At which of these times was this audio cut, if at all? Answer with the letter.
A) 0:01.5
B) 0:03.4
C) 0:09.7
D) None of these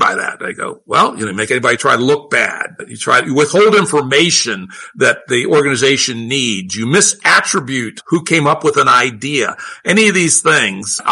A